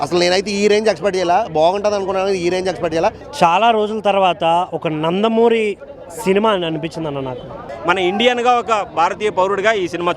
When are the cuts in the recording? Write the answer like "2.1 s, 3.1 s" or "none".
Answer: 3.2 s, 7.7 s